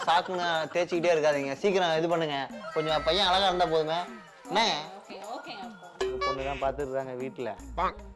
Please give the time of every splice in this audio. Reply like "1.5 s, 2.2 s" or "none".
4.3 s, 6.1 s